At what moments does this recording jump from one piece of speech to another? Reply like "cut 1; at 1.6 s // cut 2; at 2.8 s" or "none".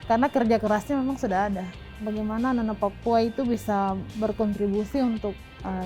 cut 1; at 2.0 s // cut 2; at 4.1 s